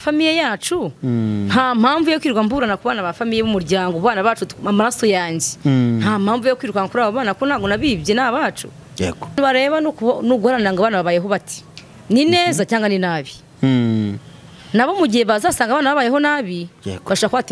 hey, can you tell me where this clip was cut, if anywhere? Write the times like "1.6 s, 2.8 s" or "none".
9.4 s

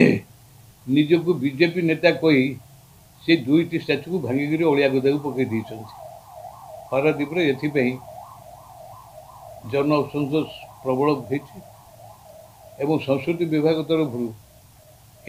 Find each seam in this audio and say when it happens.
none

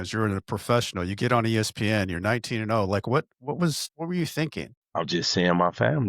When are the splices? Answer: 3.9 s, 4.8 s

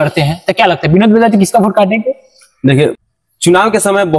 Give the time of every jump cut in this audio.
3.0 s

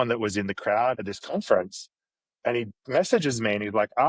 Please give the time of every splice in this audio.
1.0 s

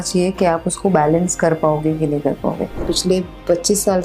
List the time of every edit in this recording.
2.8 s

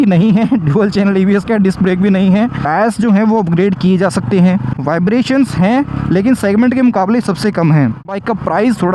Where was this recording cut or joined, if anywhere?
none

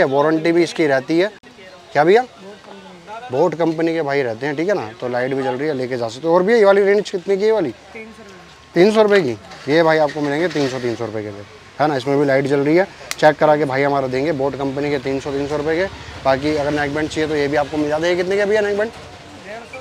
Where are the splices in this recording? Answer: none

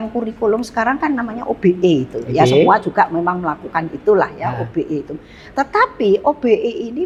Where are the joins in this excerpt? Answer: none

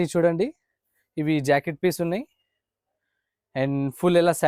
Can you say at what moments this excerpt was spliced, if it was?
none

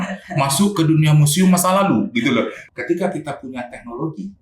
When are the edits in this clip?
2.6 s

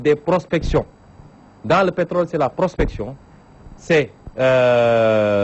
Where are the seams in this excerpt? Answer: 3.7 s

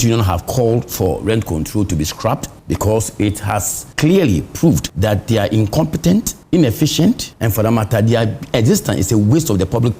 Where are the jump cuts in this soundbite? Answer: 2.5 s, 3.8 s, 4.9 s, 6.4 s, 7.3 s

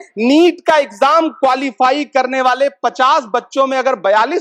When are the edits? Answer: none

